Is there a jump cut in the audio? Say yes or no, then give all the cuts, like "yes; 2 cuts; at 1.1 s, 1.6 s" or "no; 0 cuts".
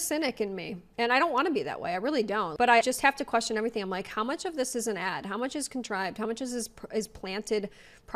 no; 0 cuts